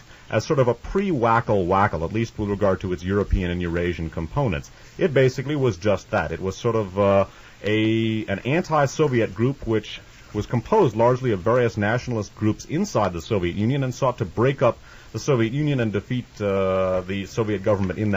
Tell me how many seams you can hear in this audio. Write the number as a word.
one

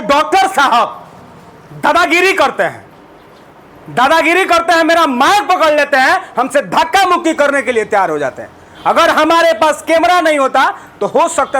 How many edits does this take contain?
zero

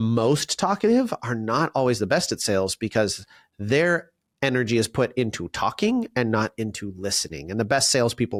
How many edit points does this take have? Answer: zero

